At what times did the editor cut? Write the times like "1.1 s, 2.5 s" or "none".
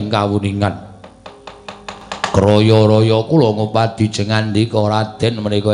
2.0 s